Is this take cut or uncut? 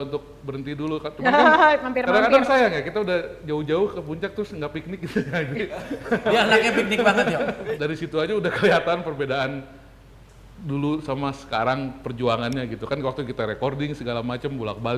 uncut